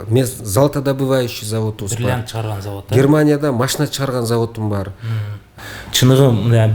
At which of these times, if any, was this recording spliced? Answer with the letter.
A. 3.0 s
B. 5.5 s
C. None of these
B